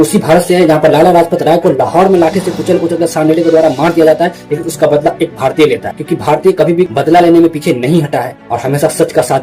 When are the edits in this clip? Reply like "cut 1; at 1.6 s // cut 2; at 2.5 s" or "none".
none